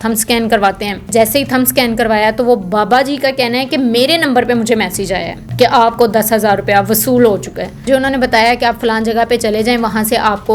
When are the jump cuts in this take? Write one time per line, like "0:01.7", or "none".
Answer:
0:01.1
0:05.4
0:07.8